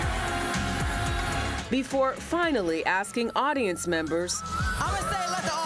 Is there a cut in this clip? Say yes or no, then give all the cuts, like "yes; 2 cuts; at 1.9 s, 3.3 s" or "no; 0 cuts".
yes; 1 cut; at 1.5 s